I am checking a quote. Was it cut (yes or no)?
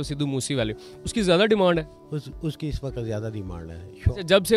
no